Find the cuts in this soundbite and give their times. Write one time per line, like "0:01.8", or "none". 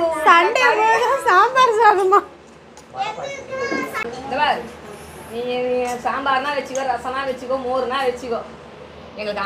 0:04.0